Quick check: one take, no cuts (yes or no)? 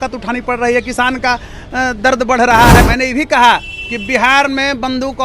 no